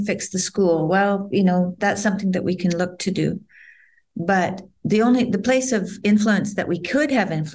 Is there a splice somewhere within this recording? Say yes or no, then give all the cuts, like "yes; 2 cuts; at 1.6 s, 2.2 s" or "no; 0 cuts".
no; 0 cuts